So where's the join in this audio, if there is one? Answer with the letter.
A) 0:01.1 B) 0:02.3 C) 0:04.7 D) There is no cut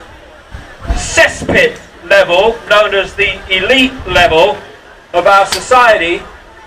A